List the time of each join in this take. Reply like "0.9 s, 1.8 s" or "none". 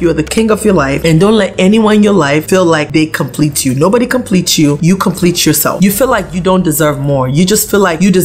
5.8 s